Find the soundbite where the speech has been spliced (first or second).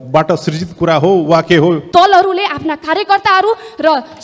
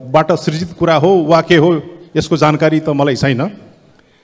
first